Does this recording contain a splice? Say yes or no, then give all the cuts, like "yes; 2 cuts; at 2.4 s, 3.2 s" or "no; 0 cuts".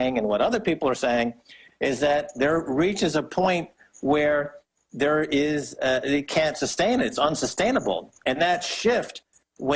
yes; 1 cut; at 2.1 s